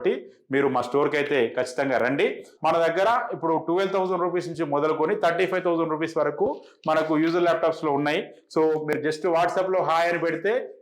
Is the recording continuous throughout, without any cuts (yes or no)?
no